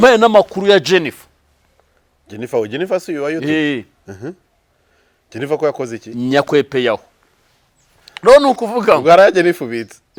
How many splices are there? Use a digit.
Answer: 0